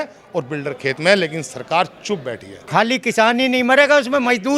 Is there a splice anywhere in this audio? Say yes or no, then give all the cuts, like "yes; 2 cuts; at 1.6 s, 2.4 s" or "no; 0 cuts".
yes; 1 cut; at 2.6 s